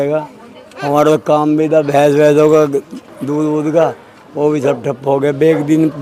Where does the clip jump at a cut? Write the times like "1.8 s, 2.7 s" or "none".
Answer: none